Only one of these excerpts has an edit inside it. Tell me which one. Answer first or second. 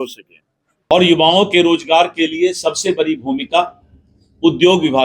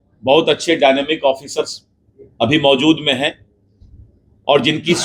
first